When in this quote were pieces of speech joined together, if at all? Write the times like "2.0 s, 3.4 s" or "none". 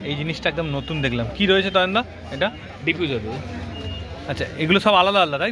none